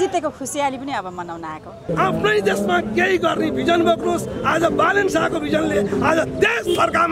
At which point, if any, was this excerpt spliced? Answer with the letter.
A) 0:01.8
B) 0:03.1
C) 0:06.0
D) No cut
A